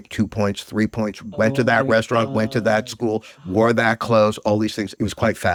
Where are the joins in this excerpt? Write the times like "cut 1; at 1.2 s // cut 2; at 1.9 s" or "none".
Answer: none

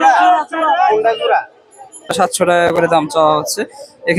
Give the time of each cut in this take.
cut 1; at 2.2 s

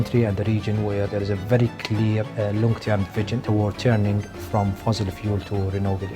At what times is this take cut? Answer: cut 1; at 1.1 s // cut 2; at 2.3 s // cut 3; at 3.4 s

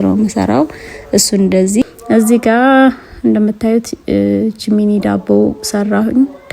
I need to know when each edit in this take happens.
cut 1; at 1.8 s

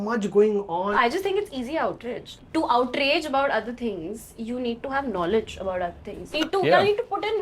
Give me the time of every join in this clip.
cut 1; at 0.9 s // cut 2; at 2.3 s // cut 3; at 6.4 s

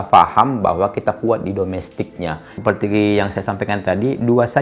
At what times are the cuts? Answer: cut 1; at 2.5 s

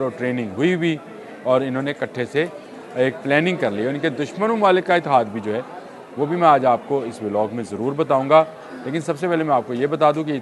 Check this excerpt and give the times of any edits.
none

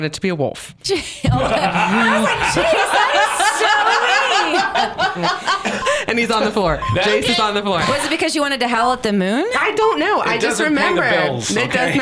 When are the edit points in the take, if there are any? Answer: none

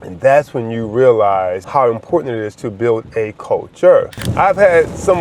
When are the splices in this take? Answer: cut 1; at 1.6 s // cut 2; at 4.2 s

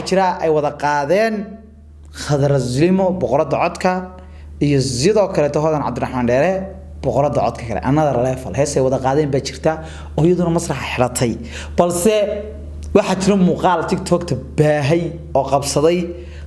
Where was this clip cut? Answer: none

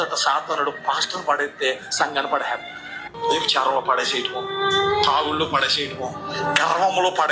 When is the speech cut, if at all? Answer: none

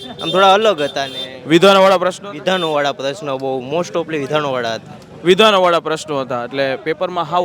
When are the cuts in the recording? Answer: none

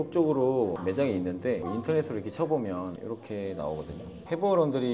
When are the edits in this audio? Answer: none

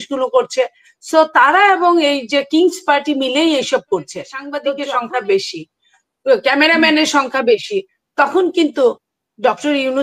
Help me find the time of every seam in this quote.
cut 1; at 4.5 s

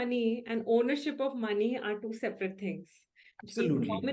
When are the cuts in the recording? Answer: none

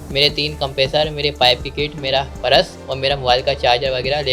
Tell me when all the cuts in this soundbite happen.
none

